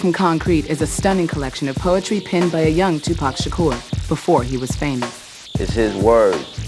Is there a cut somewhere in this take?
yes; 1 cut; at 3.4 s

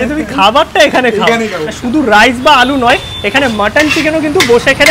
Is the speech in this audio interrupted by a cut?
yes; 1 cut; at 1.7 s

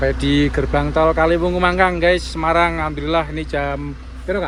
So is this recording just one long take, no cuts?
yes; 0 cuts

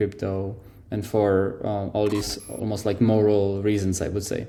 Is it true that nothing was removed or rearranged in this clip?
yes; 0 cuts

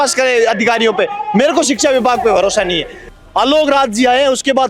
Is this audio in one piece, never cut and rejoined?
no; 1 cut; at 2.9 s

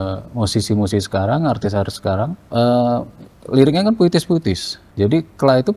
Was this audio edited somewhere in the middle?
yes; 2 cuts; at 2.4 s, 4.8 s

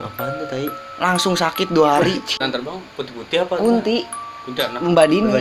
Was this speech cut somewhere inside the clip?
yes; 1 cut; at 2.4 s

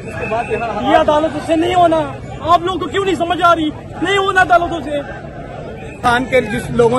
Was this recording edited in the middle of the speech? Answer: yes; 1 cut; at 6.0 s

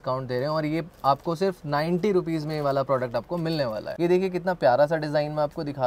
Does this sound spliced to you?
no; 0 cuts

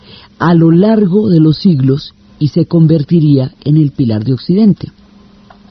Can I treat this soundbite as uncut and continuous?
no; 1 cut; at 2.0 s

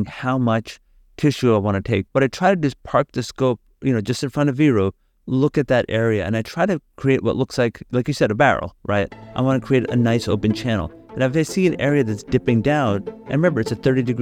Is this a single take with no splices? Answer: yes; 0 cuts

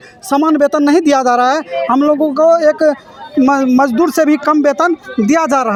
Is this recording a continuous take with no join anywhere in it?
yes; 0 cuts

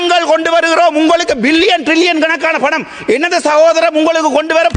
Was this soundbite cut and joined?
no; 0 cuts

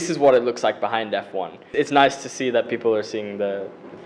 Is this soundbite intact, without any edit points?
no; 1 cut; at 1.7 s

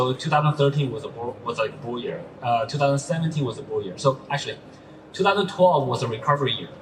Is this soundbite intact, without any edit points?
yes; 0 cuts

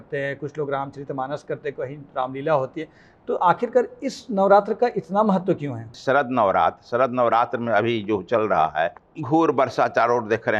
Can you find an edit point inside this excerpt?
yes; 2 cuts; at 6.0 s, 9.1 s

